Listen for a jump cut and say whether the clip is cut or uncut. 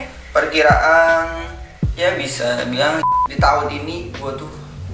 cut